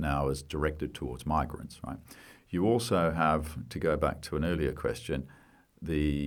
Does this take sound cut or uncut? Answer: uncut